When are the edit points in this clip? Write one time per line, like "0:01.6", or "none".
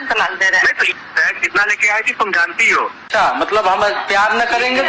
0:00.9
0:03.1